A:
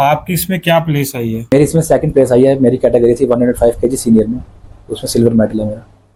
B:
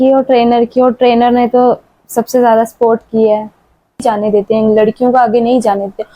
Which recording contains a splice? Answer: B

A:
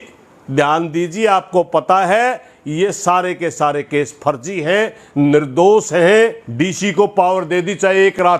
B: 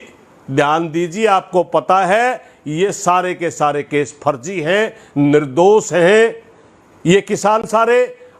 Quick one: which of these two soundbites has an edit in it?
A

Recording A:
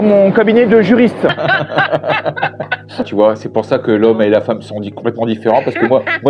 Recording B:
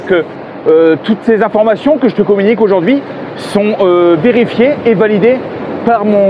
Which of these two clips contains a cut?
A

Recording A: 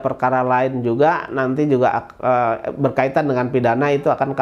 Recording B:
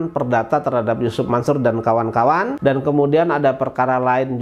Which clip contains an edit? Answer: B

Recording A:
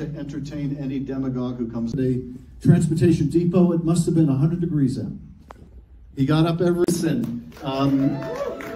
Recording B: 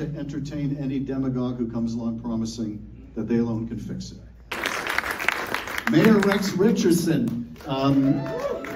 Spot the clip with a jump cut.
B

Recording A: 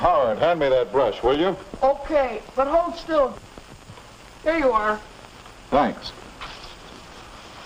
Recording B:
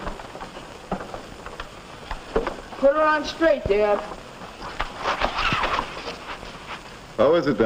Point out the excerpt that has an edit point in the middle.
A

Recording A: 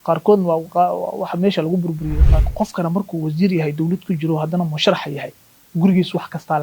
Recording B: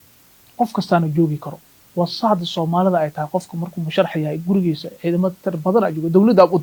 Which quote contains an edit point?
A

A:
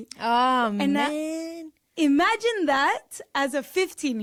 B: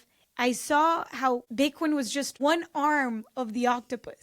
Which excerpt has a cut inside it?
B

